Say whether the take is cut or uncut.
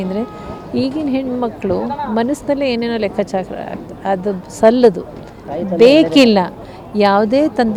uncut